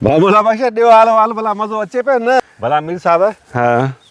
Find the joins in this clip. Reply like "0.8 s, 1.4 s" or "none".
2.4 s

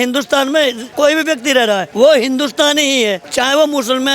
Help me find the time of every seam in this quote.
0.8 s, 1.9 s, 3.2 s

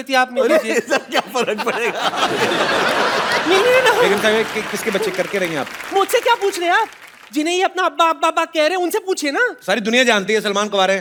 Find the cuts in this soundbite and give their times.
none

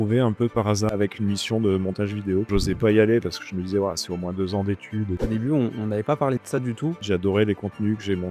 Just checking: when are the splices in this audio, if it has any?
0.9 s, 2.5 s, 5.2 s, 7.0 s

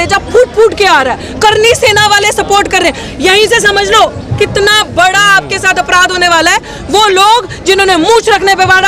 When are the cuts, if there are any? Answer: none

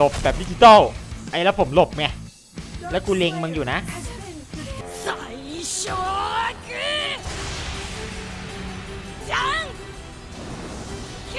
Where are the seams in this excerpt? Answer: 1.2 s

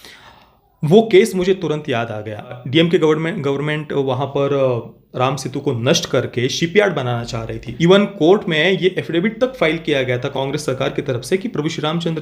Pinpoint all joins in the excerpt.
2.6 s, 7.7 s, 10.3 s

